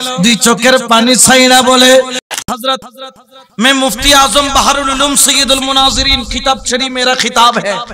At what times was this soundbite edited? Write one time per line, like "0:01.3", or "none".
0:02.3